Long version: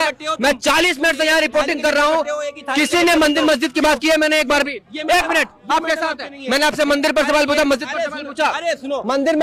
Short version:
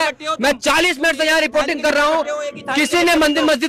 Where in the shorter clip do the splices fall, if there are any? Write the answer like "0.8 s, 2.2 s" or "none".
none